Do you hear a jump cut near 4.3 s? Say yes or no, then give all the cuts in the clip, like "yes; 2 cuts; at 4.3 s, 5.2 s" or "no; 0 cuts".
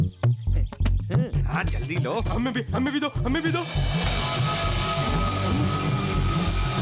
no; 1 cut; at 1.3 s